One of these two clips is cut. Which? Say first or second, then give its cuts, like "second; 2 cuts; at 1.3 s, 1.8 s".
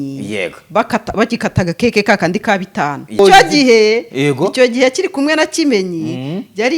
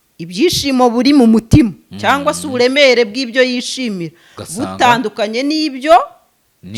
first; 1 cut; at 3.2 s